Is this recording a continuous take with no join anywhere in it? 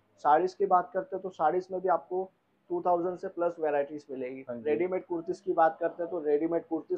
yes; 0 cuts

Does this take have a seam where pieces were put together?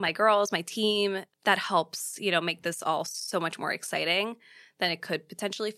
yes; 1 cut; at 1.3 s

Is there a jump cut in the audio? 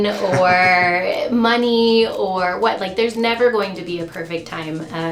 no; 0 cuts

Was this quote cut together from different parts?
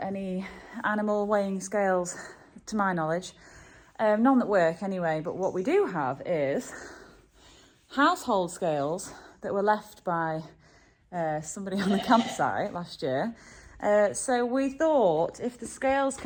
no; 0 cuts

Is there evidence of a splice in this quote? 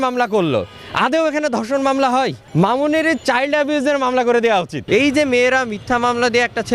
yes; 2 cuts; at 2.4 s, 4.8 s

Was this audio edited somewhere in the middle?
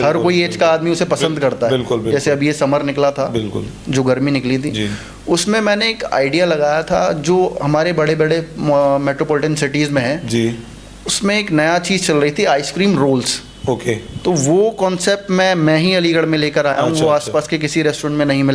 no; 0 cuts

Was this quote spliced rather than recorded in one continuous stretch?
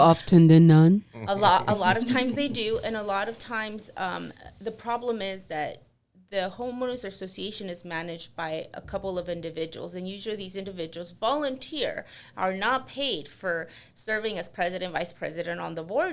no; 0 cuts

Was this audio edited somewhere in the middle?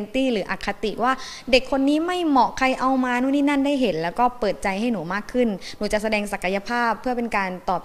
no; 0 cuts

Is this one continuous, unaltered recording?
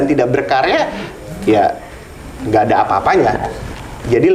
yes; 0 cuts

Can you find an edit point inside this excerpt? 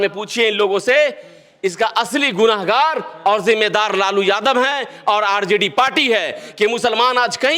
no; 0 cuts

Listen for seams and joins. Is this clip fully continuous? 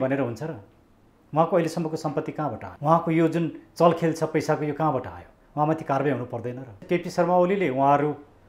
no; 2 cuts; at 2.7 s, 6.7 s

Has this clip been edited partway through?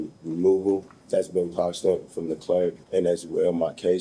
yes; 2 cuts; at 0.9 s, 2.8 s

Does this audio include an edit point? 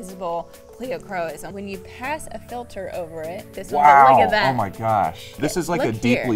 yes; 2 cuts; at 1.4 s, 5.3 s

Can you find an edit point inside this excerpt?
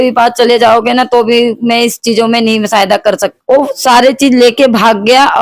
yes; 1 cut; at 3.3 s

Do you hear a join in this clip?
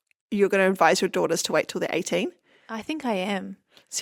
no; 0 cuts

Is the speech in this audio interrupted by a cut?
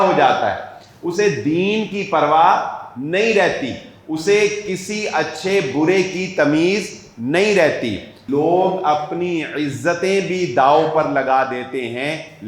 yes; 1 cut; at 8.2 s

